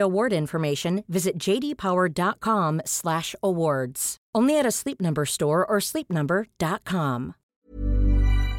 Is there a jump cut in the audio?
yes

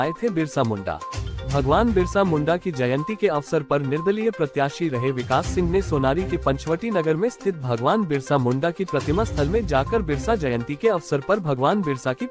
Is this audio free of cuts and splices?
yes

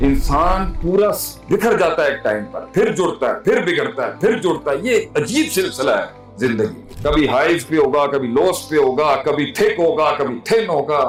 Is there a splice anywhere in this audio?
no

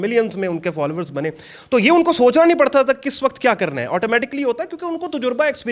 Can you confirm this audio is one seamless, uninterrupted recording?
yes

